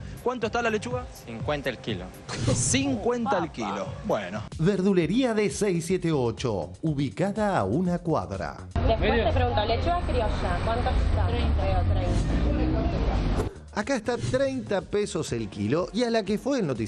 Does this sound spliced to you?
no; 0 cuts

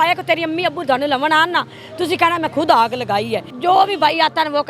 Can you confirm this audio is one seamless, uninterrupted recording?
no; 1 cut; at 3.5 s

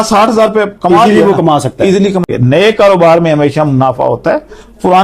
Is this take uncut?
no; 1 cut; at 2.2 s

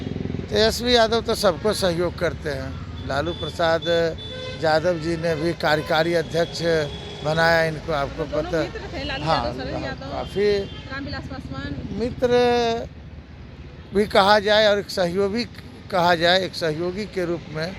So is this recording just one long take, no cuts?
yes; 0 cuts

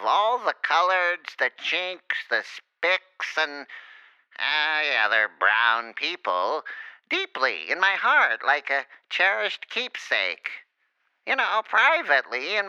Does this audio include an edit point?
no; 0 cuts

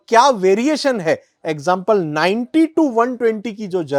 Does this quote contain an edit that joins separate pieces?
no; 0 cuts

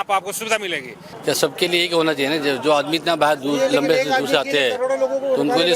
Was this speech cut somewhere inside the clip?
yes; 1 cut; at 1.1 s

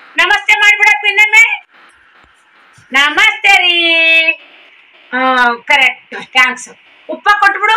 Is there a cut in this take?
no; 0 cuts

